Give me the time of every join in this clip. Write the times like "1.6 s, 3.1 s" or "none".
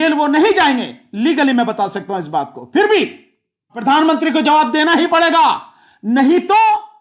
3.8 s